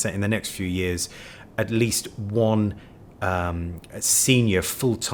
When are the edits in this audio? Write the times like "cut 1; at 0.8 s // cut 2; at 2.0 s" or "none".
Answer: none